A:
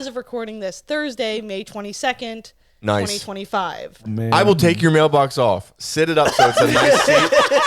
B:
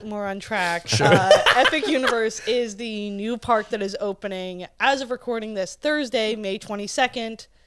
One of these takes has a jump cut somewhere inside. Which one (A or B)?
A